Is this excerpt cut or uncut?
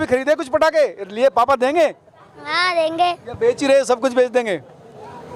uncut